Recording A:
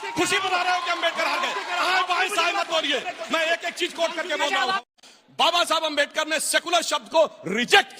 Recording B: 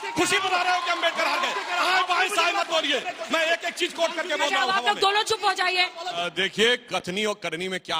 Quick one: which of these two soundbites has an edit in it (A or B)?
A